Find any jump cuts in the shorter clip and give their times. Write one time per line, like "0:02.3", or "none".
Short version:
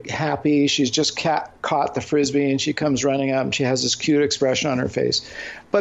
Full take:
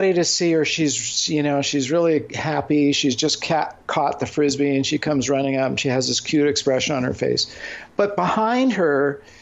none

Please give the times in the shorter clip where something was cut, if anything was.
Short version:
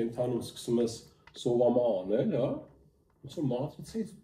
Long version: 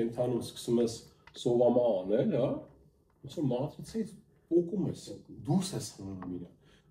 none

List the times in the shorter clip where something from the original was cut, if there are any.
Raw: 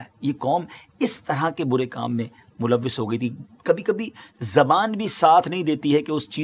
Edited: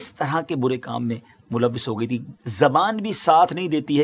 0:02.1

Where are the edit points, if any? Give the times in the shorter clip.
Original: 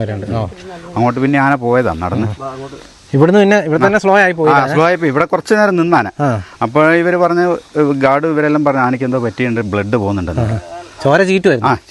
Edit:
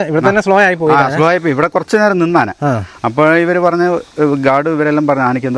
none

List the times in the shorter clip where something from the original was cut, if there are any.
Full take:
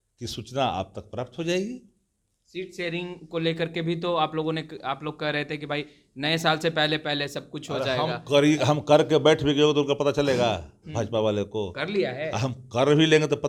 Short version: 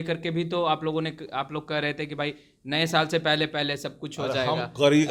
none

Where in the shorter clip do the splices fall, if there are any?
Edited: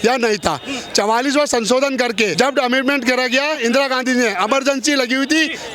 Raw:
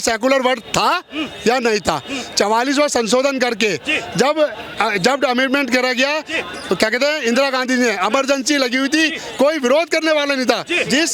0:02.3
0:03.6

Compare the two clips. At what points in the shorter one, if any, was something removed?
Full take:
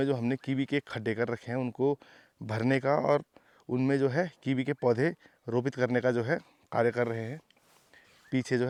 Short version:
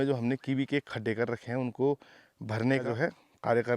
0:02.8

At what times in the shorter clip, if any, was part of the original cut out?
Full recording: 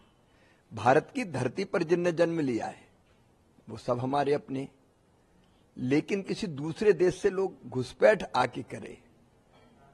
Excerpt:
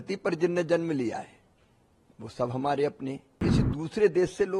0:03.4

